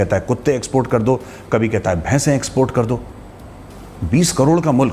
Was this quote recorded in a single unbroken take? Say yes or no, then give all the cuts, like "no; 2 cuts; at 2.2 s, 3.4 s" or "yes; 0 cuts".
yes; 0 cuts